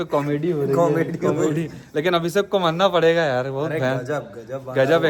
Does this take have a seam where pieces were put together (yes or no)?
no